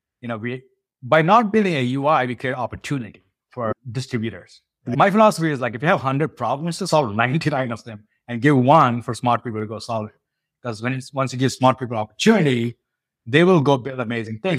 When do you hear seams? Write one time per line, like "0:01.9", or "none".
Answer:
0:04.9